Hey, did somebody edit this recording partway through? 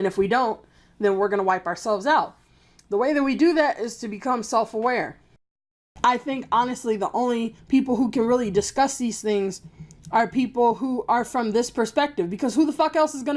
yes; 1 cut; at 5.5 s

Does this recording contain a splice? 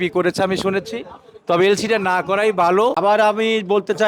yes; 1 cut; at 3.0 s

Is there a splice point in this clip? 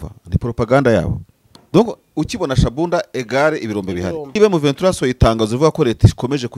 yes; 1 cut; at 4.4 s

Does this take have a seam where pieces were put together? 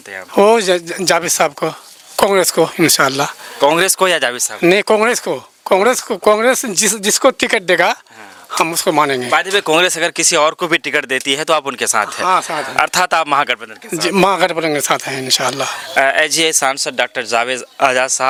no; 0 cuts

